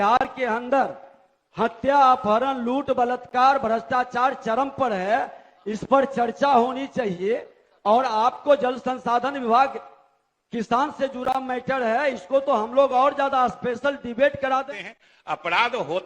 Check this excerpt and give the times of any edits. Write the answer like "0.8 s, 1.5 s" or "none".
14.7 s